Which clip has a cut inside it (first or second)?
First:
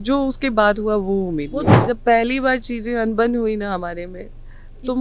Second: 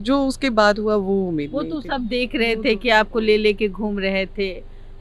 first